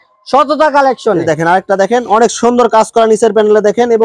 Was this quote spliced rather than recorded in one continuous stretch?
no; 0 cuts

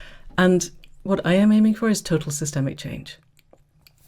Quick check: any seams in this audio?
yes; 1 cut; at 1.0 s

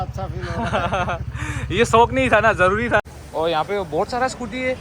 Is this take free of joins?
no; 1 cut; at 3.0 s

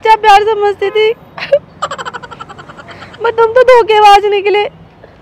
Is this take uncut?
yes; 0 cuts

